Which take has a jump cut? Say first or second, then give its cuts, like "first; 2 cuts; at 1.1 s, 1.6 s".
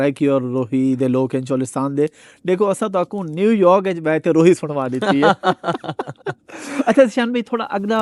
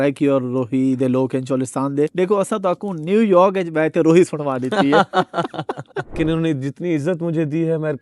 second; 2 cuts; at 2.1 s, 6.1 s